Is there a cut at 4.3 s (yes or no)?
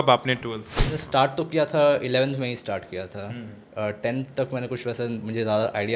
no